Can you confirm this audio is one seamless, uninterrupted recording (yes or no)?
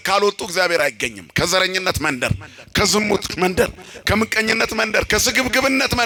yes